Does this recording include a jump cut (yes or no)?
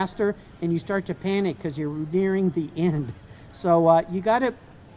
no